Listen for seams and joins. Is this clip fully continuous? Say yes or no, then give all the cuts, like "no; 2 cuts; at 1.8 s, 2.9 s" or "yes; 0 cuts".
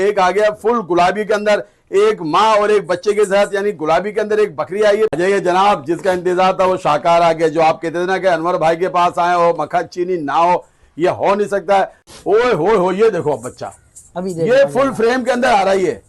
no; 2 cuts; at 5.1 s, 12.2 s